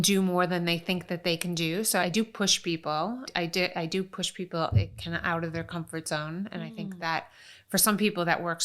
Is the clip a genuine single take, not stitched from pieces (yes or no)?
no